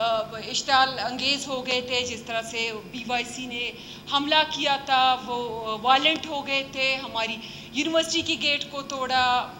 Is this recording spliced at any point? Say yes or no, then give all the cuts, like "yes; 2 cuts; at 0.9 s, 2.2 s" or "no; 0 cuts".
no; 0 cuts